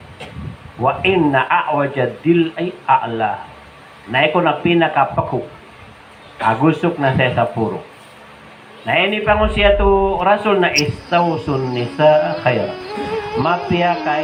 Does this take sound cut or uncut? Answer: uncut